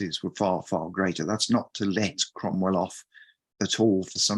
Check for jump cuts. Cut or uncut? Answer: uncut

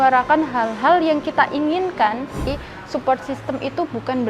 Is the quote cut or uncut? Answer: cut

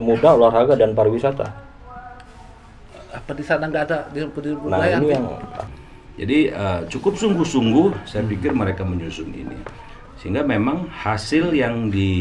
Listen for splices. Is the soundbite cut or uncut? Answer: cut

